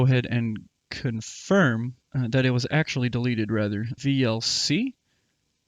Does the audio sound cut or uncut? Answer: cut